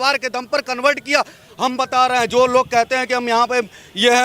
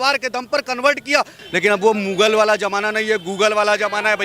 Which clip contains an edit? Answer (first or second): second